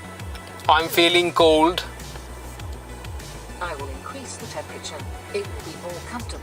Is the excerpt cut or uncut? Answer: uncut